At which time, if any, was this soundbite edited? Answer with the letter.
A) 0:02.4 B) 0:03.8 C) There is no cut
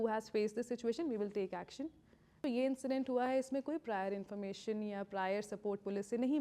A